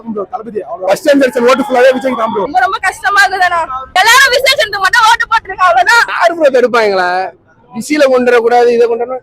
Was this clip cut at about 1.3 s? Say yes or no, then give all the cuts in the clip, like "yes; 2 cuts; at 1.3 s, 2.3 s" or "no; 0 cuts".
no; 3 cuts; at 2.5 s, 4.0 s, 6.1 s